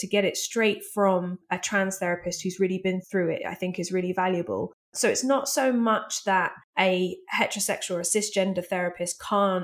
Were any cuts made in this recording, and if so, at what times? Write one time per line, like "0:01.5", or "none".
0:01.4
0:03.0
0:04.9
0:06.6